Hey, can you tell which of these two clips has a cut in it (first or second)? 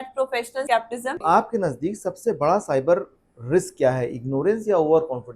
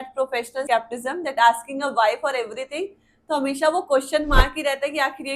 first